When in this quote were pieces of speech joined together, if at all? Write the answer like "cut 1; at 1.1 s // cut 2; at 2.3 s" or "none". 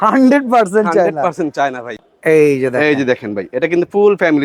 cut 1; at 1.9 s

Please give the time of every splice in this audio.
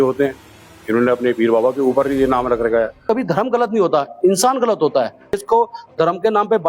cut 1; at 3.0 s // cut 2; at 5.4 s

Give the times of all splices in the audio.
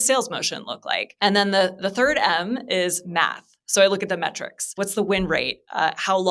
cut 1; at 1.1 s // cut 2; at 4.8 s

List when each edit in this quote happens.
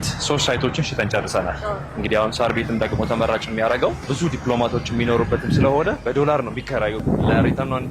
cut 1; at 4.1 s // cut 2; at 6.0 s // cut 3; at 7.0 s

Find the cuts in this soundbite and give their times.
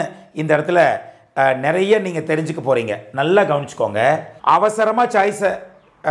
cut 1; at 4.3 s

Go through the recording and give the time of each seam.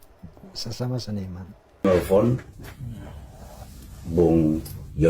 cut 1; at 1.8 s

